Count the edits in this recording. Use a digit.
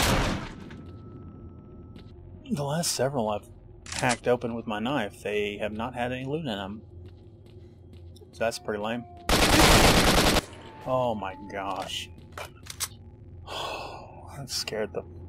1